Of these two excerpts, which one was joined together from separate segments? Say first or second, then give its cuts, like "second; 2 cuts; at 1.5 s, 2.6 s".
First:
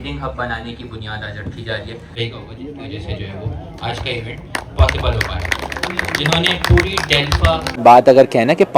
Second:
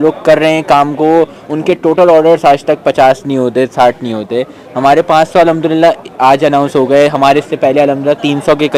first; 2 cuts; at 2.1 s, 7.6 s